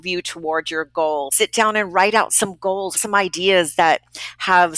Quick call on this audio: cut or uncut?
cut